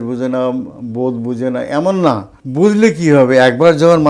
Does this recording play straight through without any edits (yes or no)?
no